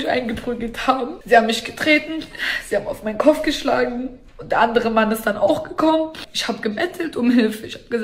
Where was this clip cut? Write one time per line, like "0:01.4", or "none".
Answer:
0:01.2
0:06.3